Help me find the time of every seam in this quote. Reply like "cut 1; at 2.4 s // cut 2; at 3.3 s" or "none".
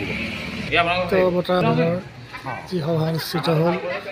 cut 1; at 1.6 s